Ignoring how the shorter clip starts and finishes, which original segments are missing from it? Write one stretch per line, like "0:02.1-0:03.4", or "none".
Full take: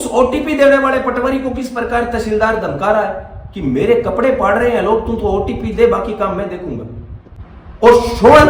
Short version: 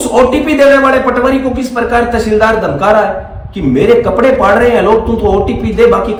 none